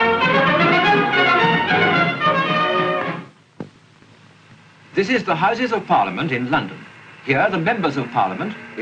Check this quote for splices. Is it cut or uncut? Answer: uncut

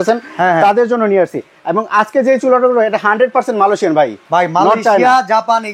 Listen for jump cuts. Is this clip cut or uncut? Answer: uncut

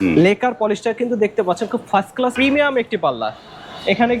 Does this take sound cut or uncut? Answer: cut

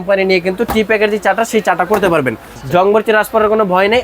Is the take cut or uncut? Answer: cut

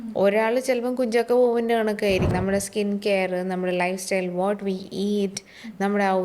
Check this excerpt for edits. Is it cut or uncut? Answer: cut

